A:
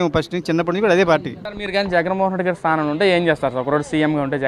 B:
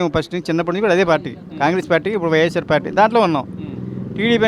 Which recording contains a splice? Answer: A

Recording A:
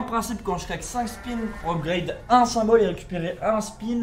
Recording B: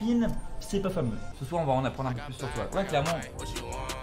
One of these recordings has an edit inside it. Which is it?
B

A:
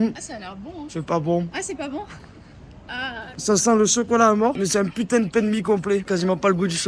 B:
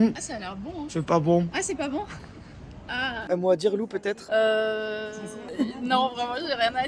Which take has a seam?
B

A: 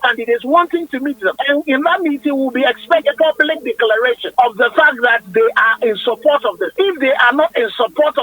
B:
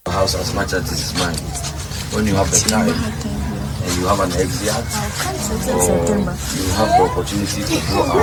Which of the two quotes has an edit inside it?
A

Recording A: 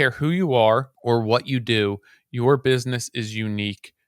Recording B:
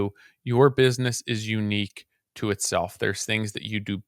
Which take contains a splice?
A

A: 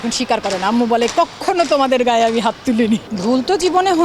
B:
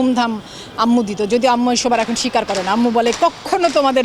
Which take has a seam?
A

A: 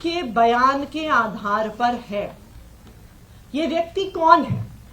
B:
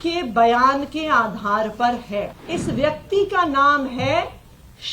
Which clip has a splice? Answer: B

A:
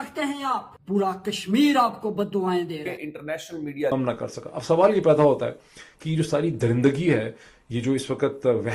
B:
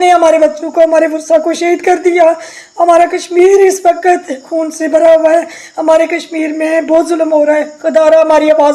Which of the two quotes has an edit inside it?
A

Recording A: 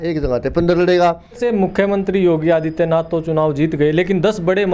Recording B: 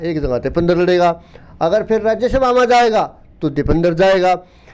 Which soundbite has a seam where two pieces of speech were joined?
A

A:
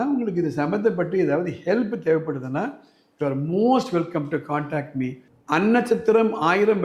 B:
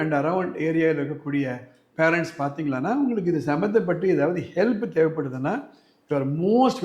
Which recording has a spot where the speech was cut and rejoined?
A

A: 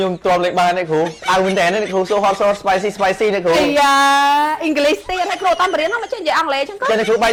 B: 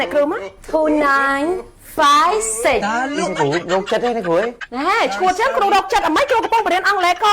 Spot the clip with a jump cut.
B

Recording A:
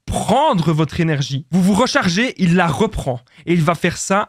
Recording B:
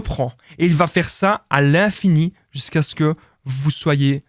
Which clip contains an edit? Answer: A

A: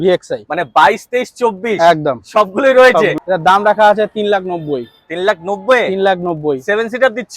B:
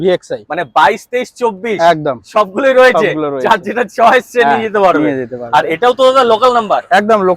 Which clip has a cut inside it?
A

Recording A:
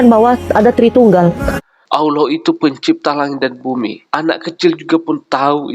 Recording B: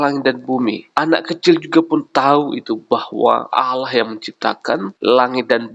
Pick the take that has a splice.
A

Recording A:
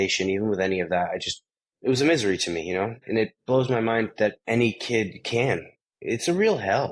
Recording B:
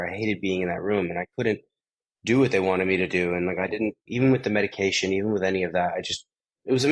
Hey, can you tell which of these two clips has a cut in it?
A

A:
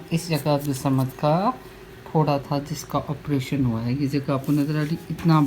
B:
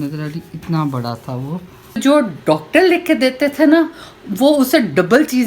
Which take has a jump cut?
B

